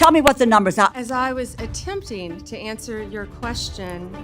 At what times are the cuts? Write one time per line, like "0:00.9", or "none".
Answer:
0:00.9